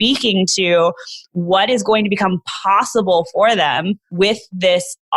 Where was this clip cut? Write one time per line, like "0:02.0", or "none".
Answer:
0:04.0